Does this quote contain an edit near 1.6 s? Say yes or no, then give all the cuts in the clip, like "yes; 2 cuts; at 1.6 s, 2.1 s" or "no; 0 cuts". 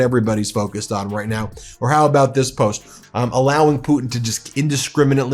no; 1 cut; at 3.0 s